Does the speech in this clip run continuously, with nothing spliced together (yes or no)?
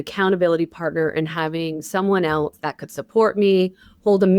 yes